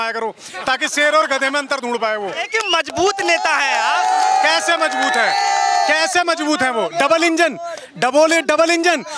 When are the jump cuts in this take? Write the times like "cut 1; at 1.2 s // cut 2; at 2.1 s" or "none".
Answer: cut 1; at 2.4 s